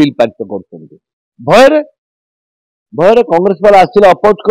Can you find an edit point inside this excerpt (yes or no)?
no